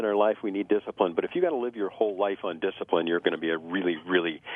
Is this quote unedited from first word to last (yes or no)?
yes